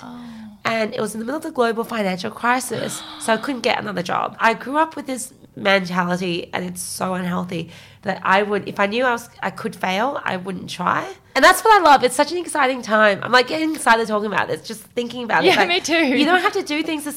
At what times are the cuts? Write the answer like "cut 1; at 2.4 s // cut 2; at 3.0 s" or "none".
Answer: cut 1; at 4.3 s // cut 2; at 11.2 s